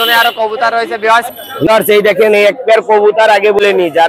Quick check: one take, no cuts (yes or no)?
no